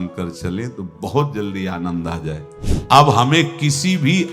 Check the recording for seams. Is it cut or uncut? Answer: cut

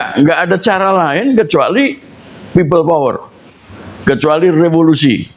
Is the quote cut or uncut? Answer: uncut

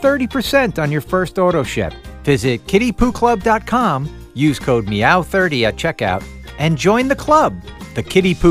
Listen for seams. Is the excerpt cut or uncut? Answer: uncut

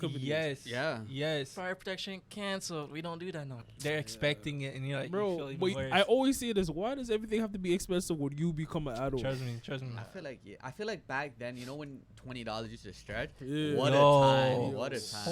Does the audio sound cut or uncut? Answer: cut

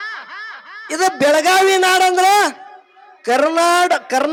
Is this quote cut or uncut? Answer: uncut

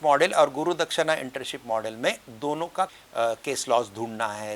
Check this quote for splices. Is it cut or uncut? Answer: cut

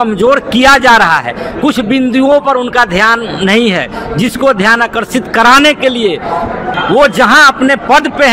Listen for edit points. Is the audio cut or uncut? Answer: cut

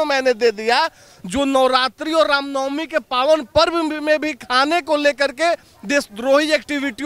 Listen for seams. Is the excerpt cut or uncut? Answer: uncut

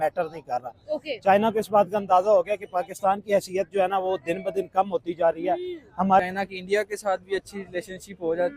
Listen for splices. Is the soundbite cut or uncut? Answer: cut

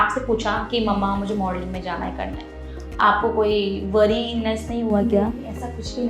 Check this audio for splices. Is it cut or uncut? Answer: uncut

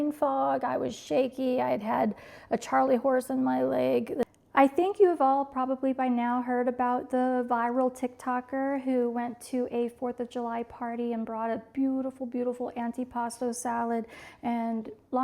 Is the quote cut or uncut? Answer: cut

